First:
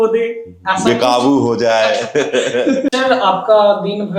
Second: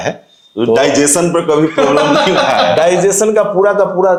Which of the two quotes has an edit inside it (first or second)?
first